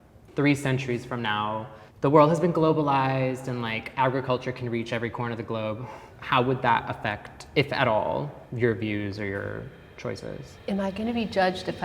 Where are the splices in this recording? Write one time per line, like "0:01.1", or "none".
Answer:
0:10.5

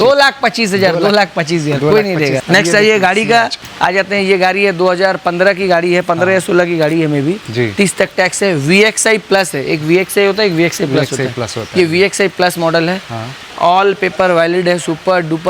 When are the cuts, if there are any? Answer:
none

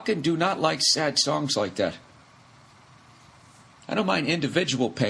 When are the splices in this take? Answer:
0:01.5

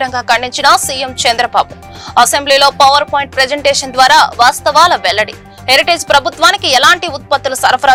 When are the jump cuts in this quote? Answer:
none

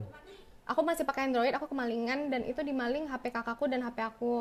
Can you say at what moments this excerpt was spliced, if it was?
none

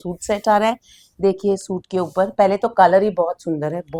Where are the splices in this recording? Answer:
none

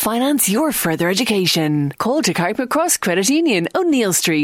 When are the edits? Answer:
none

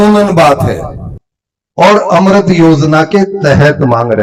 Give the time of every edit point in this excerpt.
none

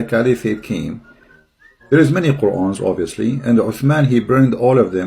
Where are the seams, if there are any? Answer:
0:01.0

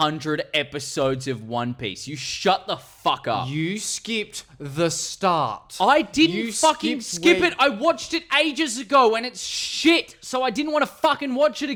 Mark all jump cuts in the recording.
none

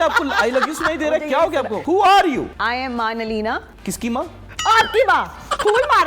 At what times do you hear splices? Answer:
0:01.8
0:02.5

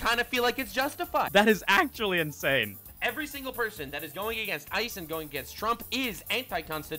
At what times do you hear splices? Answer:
0:01.3
0:02.8

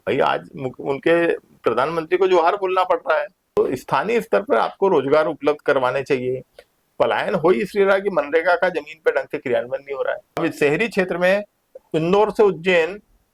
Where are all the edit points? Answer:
0:03.6
0:10.4

